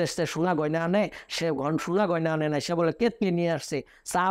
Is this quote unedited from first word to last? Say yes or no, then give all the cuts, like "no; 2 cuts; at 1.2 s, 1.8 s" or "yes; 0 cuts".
yes; 0 cuts